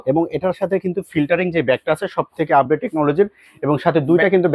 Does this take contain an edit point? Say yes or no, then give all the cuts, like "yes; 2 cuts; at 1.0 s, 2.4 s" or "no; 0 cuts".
no; 0 cuts